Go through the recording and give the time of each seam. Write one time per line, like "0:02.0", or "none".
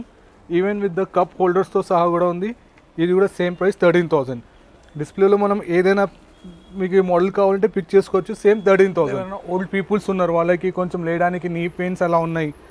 0:09.3